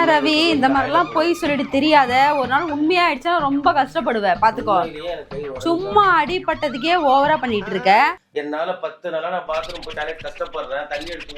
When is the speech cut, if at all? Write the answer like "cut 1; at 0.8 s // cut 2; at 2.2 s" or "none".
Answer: cut 1; at 8.2 s